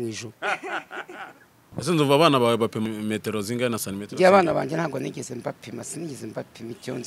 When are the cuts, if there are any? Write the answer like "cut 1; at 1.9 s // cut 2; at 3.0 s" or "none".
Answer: cut 1; at 1.5 s // cut 2; at 2.8 s